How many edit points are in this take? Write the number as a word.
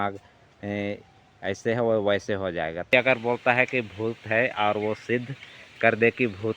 one